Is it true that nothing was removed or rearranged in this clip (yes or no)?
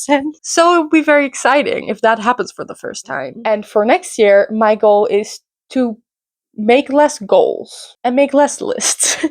no